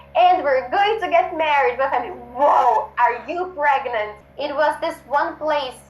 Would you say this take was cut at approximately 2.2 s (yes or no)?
no